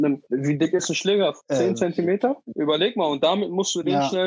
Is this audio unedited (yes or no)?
yes